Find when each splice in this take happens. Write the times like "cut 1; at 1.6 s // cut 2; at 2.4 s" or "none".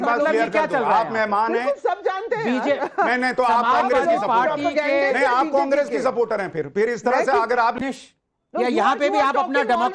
cut 1; at 7.8 s